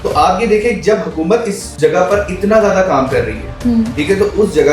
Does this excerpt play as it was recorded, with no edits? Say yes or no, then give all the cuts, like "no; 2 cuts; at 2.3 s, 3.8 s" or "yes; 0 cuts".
no; 1 cut; at 1.7 s